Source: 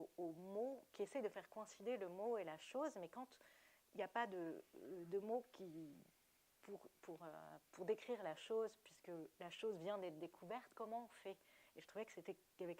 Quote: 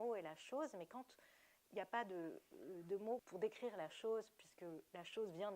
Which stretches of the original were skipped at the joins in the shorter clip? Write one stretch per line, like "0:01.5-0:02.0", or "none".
0:05.5-0:07.7